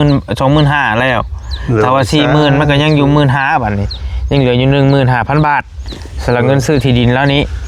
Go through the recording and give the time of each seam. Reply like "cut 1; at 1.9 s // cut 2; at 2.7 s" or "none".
none